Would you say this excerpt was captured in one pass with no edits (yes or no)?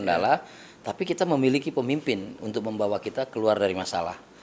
yes